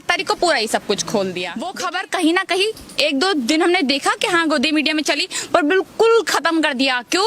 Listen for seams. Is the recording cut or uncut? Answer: cut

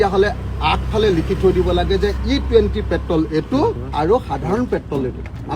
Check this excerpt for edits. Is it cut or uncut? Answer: uncut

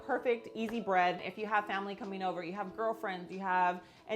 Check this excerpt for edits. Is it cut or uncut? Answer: cut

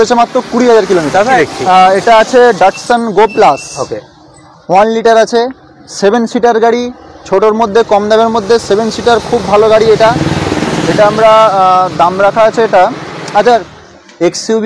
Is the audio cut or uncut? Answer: cut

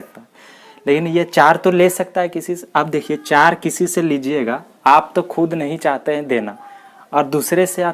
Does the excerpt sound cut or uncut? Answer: uncut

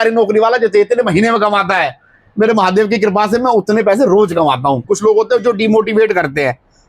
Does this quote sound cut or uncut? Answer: cut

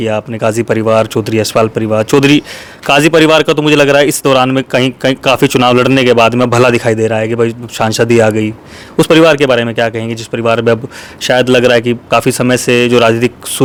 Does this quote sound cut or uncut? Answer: uncut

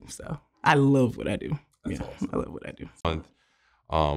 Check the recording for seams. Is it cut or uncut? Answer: cut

